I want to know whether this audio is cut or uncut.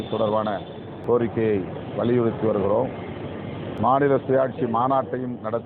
cut